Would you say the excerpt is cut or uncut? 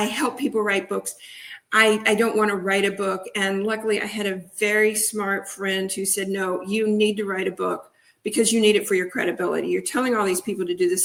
uncut